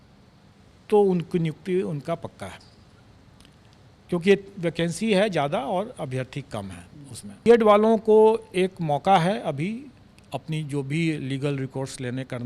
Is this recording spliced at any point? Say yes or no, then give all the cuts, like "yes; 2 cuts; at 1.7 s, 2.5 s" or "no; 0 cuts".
yes; 1 cut; at 7.5 s